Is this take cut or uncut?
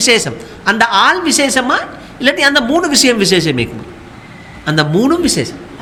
uncut